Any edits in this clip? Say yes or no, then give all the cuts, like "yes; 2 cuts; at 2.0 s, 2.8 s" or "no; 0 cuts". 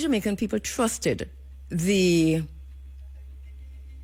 no; 0 cuts